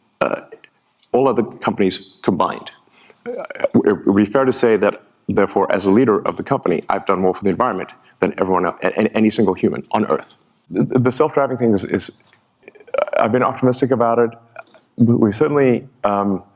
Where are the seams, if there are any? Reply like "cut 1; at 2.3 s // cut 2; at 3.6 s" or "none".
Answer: cut 1; at 10.6 s